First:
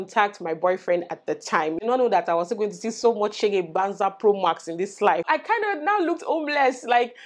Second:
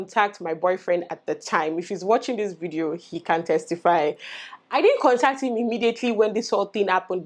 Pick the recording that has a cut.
first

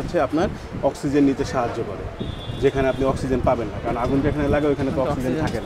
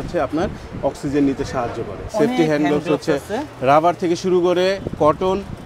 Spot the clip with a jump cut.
second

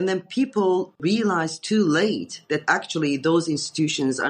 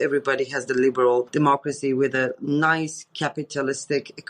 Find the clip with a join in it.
second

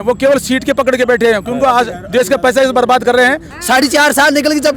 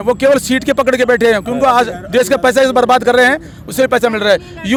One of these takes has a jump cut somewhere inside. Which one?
first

